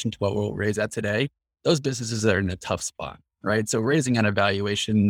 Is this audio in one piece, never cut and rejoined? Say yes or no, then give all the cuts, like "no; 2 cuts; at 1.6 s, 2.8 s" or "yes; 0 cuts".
yes; 0 cuts